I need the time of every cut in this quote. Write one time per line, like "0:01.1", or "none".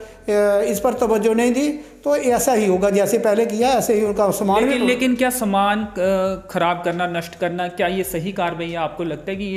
none